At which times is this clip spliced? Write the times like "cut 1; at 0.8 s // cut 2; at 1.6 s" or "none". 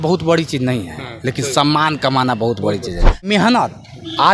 cut 1; at 3.3 s